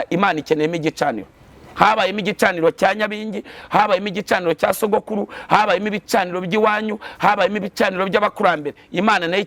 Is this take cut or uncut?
uncut